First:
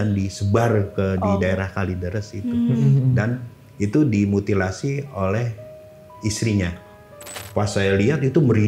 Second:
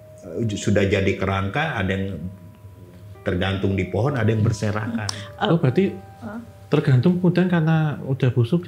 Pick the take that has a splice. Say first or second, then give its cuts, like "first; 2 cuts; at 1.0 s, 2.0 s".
first; 1 cut; at 7.4 s